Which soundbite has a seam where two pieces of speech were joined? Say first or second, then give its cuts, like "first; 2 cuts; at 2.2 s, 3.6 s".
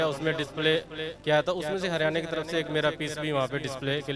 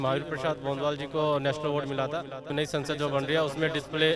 second; 1 cut; at 2.4 s